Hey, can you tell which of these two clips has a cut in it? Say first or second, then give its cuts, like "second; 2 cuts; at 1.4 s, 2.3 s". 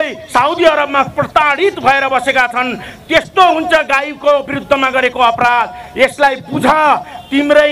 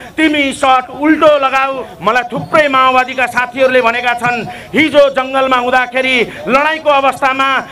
second; 1 cut; at 1.9 s